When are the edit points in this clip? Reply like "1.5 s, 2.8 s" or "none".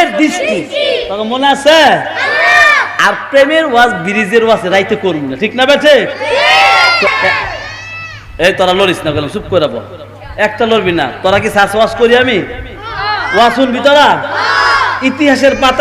7.1 s